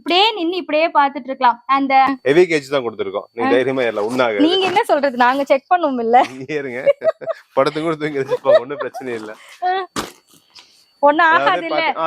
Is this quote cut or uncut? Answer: cut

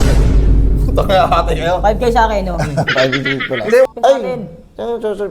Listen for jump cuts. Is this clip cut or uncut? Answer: cut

